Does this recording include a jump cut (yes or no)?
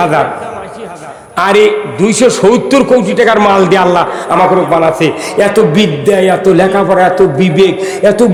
no